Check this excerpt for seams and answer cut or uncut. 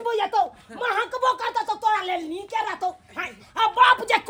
uncut